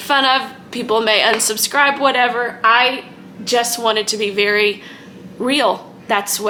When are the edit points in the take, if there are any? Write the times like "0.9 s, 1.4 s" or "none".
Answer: none